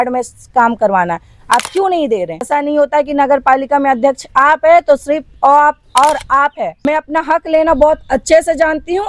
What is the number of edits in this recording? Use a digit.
2